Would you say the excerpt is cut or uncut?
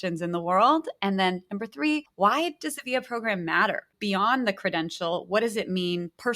cut